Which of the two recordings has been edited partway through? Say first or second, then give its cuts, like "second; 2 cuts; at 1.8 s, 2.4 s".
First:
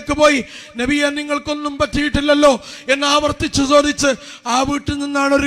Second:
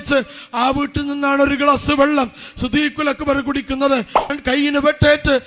second; 1 cut; at 4.3 s